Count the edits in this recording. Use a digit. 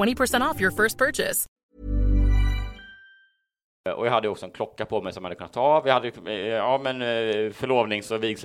2